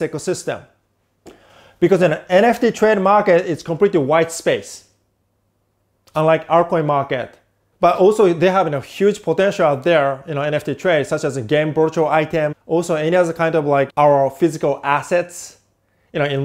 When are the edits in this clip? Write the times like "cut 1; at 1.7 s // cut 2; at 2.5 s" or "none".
cut 1; at 12.6 s

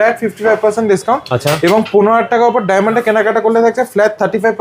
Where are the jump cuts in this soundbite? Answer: none

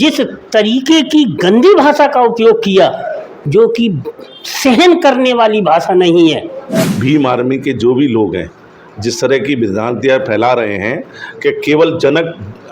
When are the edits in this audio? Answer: cut 1; at 6.9 s

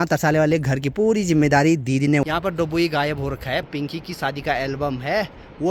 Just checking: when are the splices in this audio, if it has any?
cut 1; at 2.2 s // cut 2; at 3.7 s

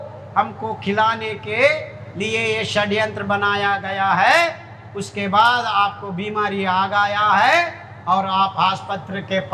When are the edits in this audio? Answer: none

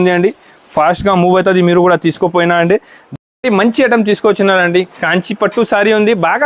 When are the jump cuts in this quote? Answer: cut 1; at 3.0 s

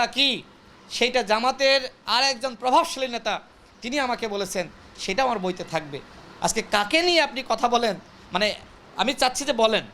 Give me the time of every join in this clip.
none

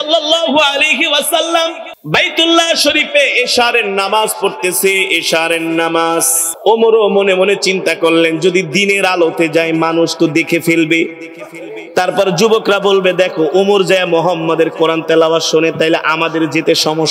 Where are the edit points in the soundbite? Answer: cut 1; at 1.9 s // cut 2; at 6.5 s

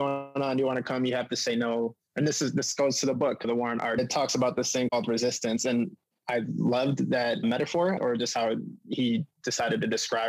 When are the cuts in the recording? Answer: cut 1; at 8.0 s

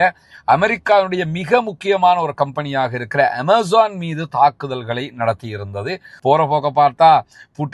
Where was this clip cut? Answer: cut 1; at 6.1 s

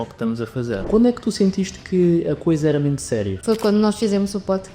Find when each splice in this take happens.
cut 1; at 0.8 s // cut 2; at 3.3 s

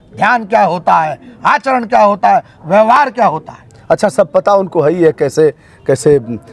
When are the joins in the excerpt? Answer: none

